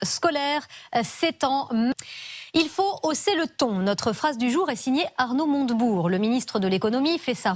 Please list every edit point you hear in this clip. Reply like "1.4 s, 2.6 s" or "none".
5.9 s